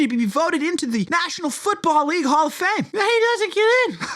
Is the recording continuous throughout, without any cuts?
no; 2 cuts; at 1.1 s, 2.9 s

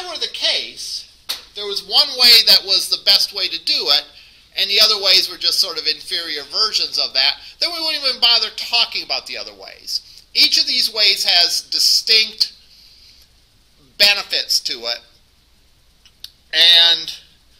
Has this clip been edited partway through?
no; 0 cuts

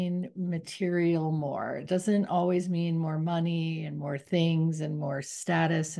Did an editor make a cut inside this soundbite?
no; 0 cuts

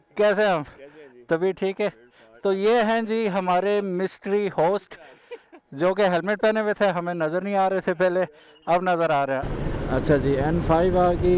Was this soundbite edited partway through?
yes; 1 cut; at 9.6 s

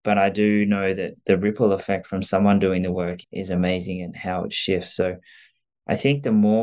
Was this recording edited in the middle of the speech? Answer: yes; 1 cut; at 3.2 s

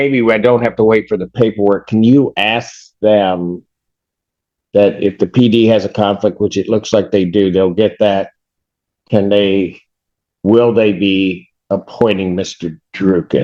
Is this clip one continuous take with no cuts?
yes; 0 cuts

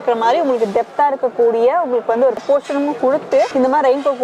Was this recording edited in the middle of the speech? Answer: no; 0 cuts

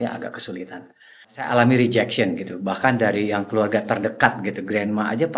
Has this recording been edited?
yes; 1 cut; at 1.5 s

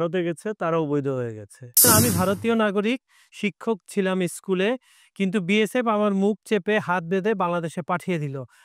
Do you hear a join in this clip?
yes; 1 cut; at 1.9 s

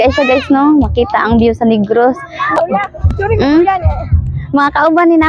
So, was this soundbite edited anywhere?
yes; 1 cut; at 2.6 s

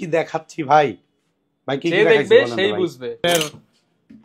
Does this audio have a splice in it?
yes; 1 cut; at 3.2 s

